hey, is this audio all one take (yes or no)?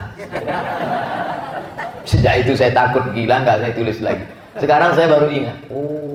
yes